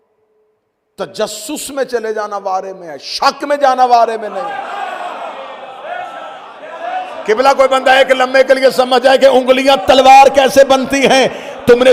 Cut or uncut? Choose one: uncut